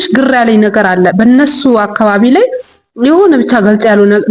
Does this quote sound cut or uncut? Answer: uncut